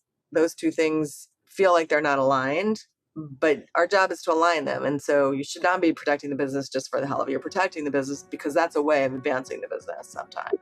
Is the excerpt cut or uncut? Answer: uncut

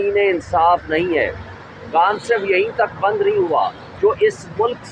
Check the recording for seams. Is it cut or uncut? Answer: cut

